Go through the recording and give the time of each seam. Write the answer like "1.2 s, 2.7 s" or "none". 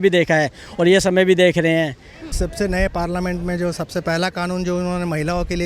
2.3 s